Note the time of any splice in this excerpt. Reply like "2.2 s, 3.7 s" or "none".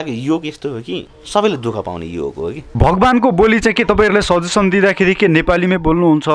1.1 s, 2.6 s